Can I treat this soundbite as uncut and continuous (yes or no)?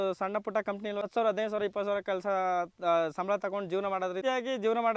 no